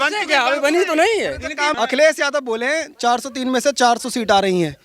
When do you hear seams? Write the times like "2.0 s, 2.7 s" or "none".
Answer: 1.7 s